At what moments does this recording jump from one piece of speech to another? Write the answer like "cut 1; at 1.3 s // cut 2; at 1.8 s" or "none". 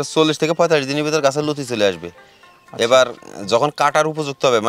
none